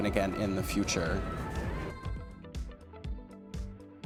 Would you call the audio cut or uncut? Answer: uncut